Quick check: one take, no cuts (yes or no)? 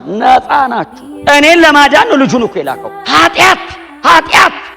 no